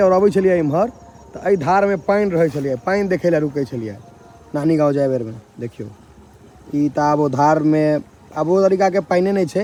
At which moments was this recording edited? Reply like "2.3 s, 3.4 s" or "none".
none